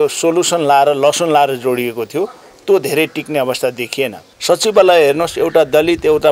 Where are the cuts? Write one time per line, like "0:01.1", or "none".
0:04.3